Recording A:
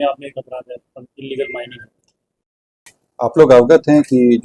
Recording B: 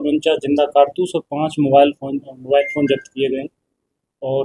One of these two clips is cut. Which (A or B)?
A